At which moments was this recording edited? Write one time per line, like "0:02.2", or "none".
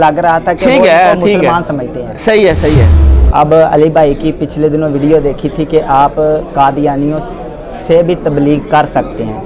0:03.0